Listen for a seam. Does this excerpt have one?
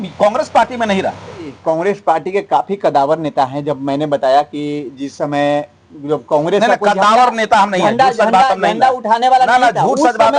yes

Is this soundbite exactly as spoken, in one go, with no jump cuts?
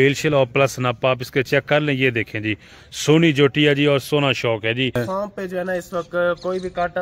no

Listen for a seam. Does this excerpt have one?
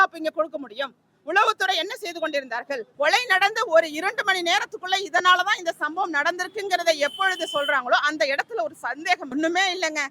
yes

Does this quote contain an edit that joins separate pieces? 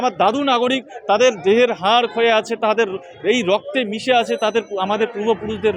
no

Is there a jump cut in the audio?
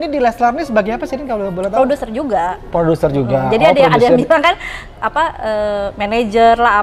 no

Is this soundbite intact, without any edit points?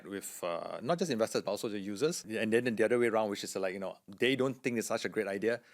no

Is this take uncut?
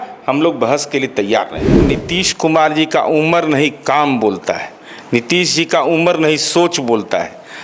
no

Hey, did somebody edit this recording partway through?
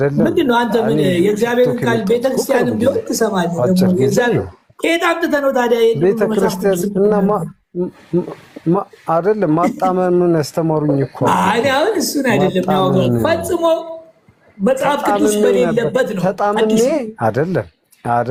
no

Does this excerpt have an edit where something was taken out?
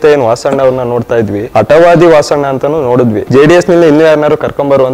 yes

